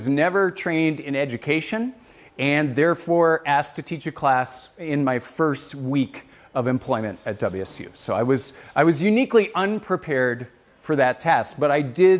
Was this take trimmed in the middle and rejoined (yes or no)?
yes